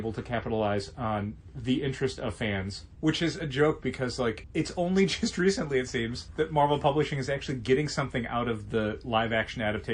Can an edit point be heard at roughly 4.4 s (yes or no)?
yes